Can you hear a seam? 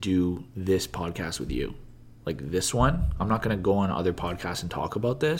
no; 0 cuts

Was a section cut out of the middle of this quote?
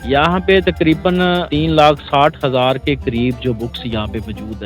yes; 1 cut; at 1.5 s

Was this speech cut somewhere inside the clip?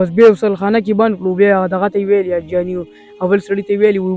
no; 0 cuts

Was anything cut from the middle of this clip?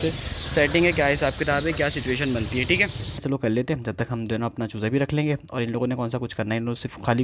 yes; 1 cut; at 3.2 s

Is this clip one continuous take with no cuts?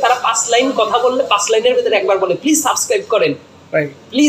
yes; 0 cuts

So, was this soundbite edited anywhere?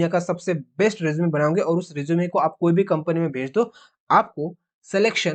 no; 0 cuts

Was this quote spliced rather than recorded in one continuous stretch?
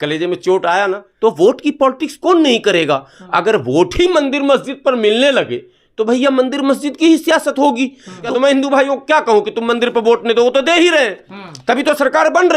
yes; 2 cuts; at 1.1 s, 8.2 s

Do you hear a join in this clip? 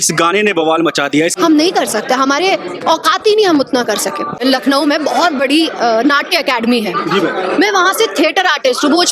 yes; 2 cuts; at 1.3 s, 4.3 s

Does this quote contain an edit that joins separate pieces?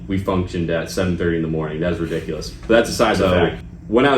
yes; 1 cut; at 3.2 s

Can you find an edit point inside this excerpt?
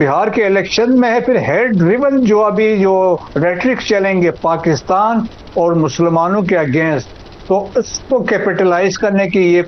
no; 0 cuts

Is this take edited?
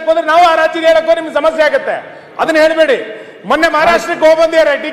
no; 0 cuts

